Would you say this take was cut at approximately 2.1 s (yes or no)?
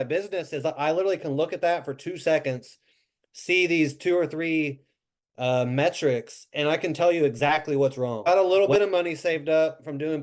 no